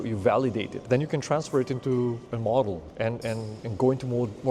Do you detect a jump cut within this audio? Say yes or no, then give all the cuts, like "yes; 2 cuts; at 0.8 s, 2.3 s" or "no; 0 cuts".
yes; 3 cuts; at 0.8 s, 2.3 s, 2.9 s